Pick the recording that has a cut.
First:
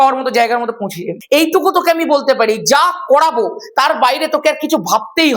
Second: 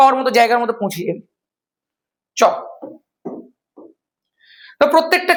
first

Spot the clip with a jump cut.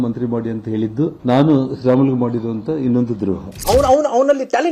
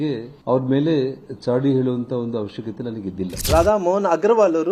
first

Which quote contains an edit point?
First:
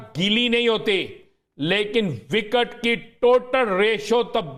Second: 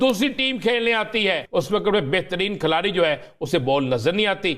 second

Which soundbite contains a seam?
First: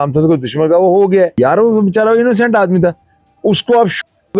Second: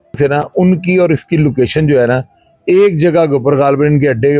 first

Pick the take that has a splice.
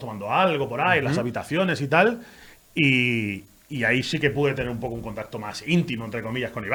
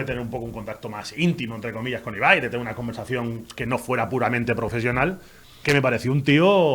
second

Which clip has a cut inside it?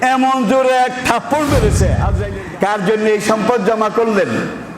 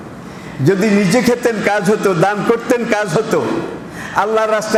first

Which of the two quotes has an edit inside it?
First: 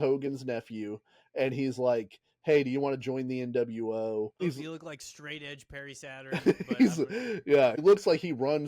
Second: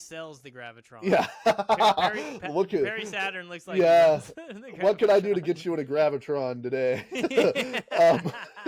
first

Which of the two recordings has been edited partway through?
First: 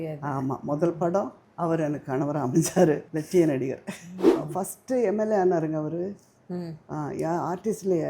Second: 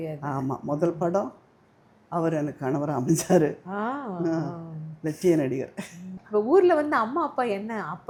first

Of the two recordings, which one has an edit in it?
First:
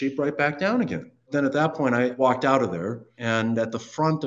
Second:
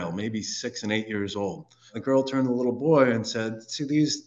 first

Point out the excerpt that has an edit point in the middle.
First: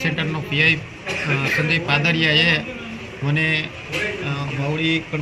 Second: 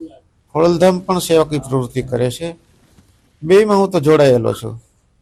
first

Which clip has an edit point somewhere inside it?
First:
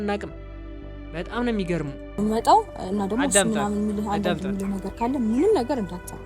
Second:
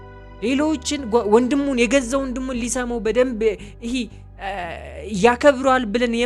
first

